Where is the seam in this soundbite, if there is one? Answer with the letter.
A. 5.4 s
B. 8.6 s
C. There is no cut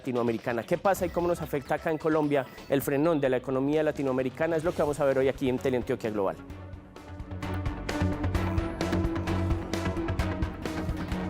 A